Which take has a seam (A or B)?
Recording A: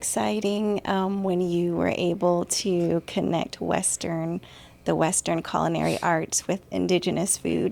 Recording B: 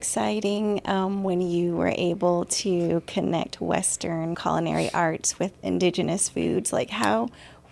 B